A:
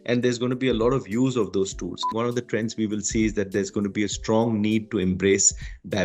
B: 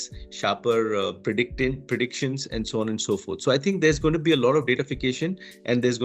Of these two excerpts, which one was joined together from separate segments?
A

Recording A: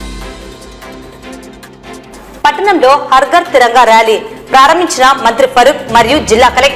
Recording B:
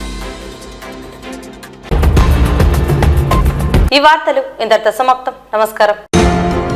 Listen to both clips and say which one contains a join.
A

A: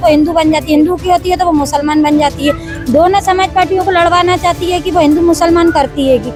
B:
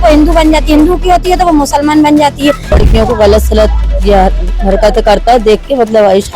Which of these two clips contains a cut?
B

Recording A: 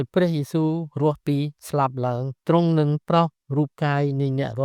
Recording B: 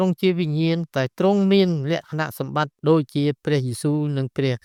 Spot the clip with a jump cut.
A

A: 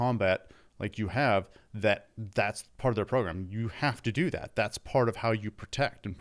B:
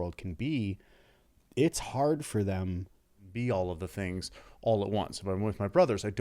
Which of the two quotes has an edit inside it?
B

